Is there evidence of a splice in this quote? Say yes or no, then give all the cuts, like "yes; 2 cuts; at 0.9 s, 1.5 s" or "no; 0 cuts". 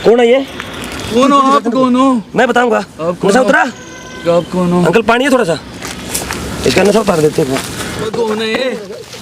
yes; 2 cuts; at 1.0 s, 8.1 s